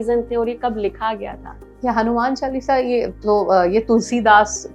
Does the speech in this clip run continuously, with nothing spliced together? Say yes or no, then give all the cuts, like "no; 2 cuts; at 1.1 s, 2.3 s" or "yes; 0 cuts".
yes; 0 cuts